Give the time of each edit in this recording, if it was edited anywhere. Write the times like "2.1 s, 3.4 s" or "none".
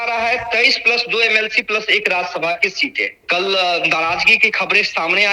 3.2 s